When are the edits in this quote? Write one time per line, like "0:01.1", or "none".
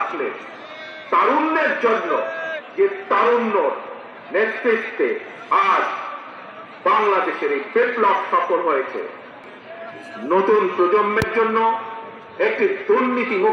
0:09.4